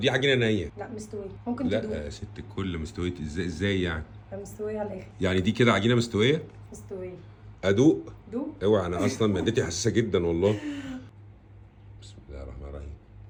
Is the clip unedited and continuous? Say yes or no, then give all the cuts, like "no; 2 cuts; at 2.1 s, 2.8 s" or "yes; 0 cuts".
yes; 0 cuts